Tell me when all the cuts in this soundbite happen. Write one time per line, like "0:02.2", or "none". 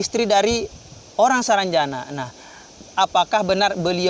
0:02.9